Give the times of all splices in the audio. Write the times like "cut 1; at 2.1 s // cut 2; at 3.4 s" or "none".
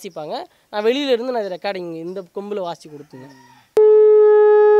cut 1; at 3.8 s